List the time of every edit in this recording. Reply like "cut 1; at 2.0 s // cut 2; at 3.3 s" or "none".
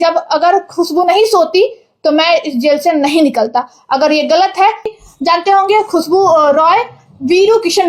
cut 1; at 4.9 s